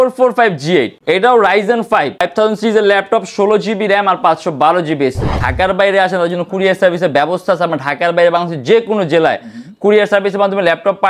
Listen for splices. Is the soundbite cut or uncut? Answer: cut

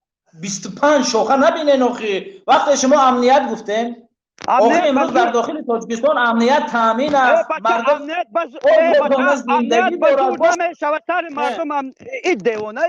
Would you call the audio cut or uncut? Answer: uncut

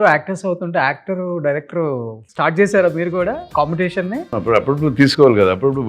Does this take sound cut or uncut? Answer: cut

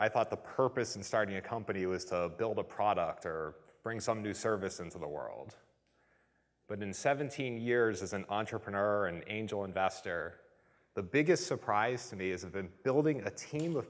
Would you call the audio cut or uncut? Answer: uncut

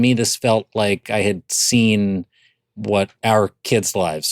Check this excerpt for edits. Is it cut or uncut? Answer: cut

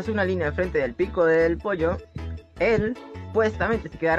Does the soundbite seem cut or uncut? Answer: cut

